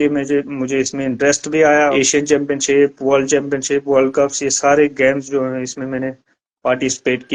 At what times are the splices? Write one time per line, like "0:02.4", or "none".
0:01.9